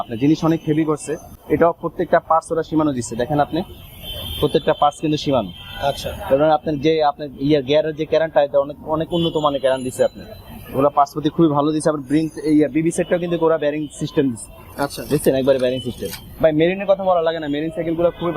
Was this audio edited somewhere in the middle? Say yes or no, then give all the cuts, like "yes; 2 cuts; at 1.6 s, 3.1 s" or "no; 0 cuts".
no; 0 cuts